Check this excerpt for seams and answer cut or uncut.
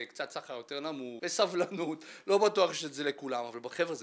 cut